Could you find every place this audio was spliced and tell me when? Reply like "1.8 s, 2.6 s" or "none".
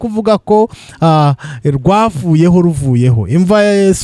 none